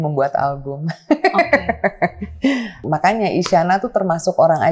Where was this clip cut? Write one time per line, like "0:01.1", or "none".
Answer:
0:02.8